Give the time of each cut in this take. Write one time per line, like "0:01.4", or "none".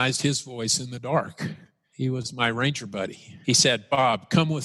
0:01.9
0:03.4